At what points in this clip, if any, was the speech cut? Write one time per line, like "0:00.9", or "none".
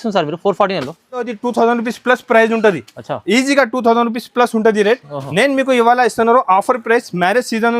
0:01.3